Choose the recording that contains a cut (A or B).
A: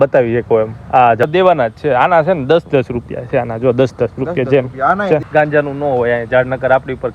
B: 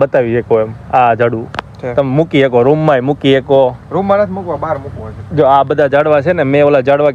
A